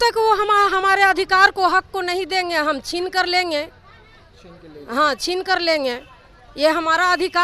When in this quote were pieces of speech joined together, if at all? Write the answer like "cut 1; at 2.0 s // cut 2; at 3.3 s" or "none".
none